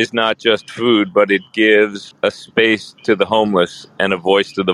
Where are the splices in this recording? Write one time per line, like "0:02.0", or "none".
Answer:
0:02.0

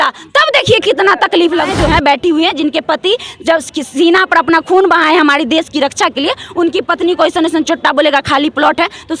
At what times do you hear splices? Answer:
0:01.7

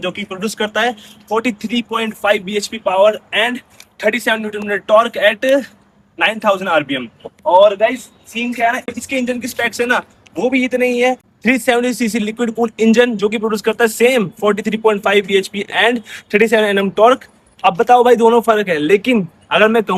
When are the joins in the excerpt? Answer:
none

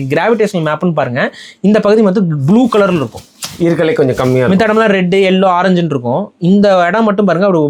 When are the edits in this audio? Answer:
none

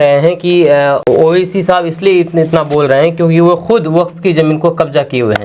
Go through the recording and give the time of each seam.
0:01.0

